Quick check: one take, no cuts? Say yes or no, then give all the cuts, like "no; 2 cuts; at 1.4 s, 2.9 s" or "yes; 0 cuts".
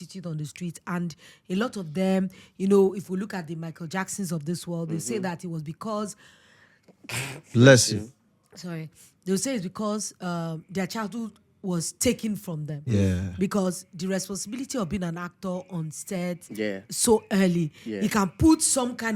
yes; 0 cuts